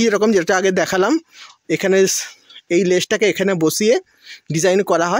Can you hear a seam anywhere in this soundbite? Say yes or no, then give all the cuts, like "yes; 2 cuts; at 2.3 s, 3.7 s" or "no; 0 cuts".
no; 0 cuts